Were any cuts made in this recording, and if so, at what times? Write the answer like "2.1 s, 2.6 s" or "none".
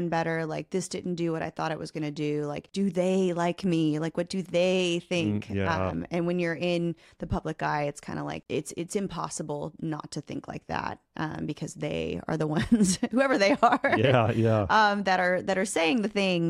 2.7 s, 8.4 s